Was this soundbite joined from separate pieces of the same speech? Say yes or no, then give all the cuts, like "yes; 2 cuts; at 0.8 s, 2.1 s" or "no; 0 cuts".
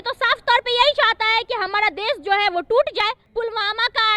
yes; 1 cut; at 3.2 s